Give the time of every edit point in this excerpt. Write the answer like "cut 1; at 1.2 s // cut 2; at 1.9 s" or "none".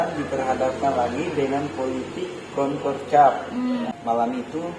cut 1; at 3.9 s